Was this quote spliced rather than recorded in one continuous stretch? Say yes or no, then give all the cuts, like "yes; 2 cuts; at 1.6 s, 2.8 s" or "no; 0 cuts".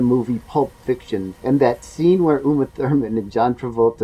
yes; 1 cut; at 1.3 s